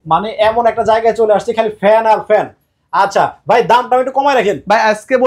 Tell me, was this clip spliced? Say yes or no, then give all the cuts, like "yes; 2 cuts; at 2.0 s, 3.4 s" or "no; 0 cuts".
no; 0 cuts